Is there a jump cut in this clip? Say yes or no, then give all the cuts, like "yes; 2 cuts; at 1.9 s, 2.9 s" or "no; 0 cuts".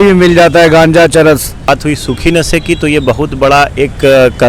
yes; 1 cut; at 1.7 s